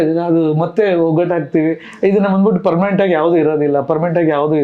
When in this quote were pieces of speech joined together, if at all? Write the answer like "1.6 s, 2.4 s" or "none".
none